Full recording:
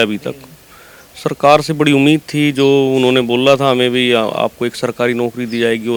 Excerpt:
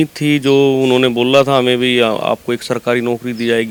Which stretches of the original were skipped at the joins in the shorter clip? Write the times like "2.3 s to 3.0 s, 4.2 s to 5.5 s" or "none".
none

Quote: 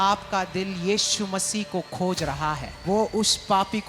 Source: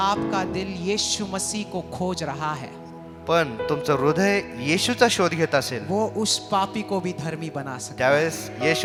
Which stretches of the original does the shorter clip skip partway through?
2.7 s to 5.8 s

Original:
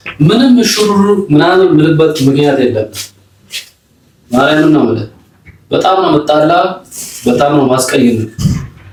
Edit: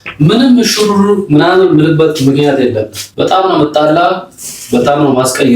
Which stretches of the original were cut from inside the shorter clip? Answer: 3.0 s to 5.5 s

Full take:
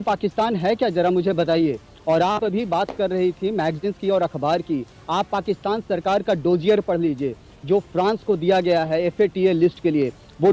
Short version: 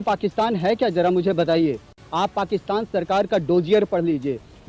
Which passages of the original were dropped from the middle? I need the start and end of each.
1.9 s to 4.9 s

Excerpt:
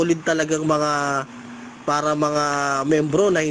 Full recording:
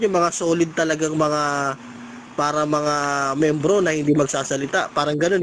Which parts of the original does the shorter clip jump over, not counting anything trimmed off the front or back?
none

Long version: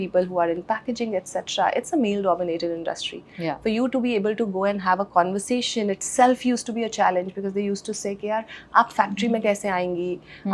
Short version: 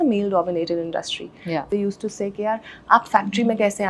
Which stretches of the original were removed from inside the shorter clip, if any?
3.6 s to 7.5 s

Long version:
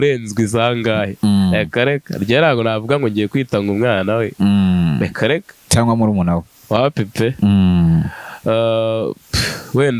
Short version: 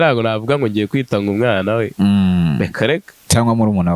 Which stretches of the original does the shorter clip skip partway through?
none

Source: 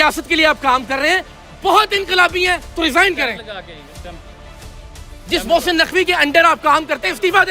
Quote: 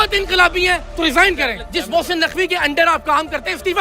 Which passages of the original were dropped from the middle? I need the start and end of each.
3.4 s to 5.2 s

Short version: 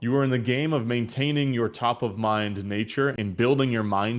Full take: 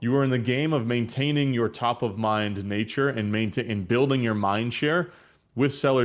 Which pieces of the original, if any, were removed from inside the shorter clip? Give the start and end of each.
3.2 s to 3.7 s

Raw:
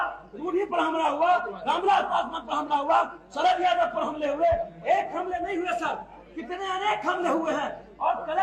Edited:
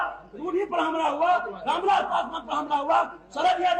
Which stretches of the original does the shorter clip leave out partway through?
none

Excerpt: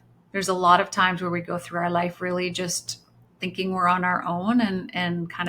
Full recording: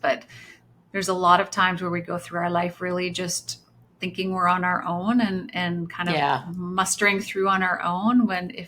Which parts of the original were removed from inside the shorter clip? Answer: none

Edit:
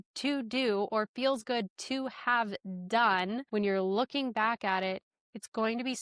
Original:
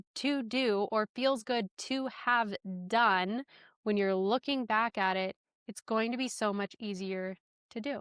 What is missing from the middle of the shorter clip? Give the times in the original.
3.4 s to 3.8 s

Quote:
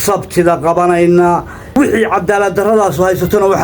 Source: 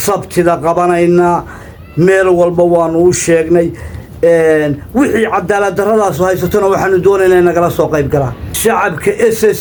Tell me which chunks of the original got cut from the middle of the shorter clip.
1.6 s to 4.8 s

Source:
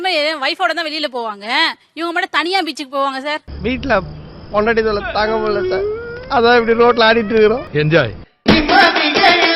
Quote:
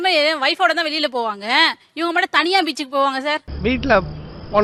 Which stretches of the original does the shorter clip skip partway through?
none

